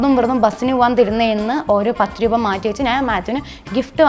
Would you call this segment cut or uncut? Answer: uncut